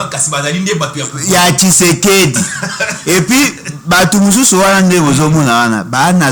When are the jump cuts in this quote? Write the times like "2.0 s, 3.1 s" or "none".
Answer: none